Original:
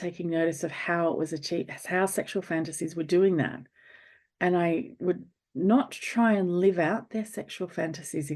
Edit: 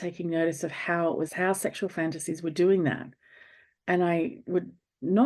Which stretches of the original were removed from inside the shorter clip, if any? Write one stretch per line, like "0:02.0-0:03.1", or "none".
0:01.3-0:01.8